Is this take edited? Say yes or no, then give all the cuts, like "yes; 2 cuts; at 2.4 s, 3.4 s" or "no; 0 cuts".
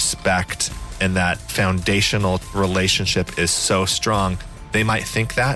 yes; 3 cuts; at 1.3 s, 2.5 s, 4.5 s